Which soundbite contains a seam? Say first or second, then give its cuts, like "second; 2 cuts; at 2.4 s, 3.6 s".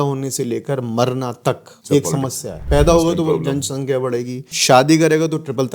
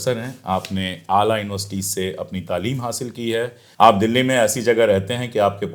first; 3 cuts; at 1.7 s, 2.5 s, 4.4 s